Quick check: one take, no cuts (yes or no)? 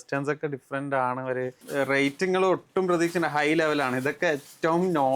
no